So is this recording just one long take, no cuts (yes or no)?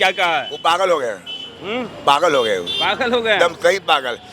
yes